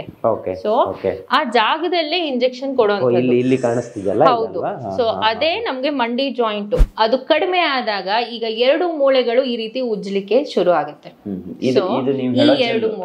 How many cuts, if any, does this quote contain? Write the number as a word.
one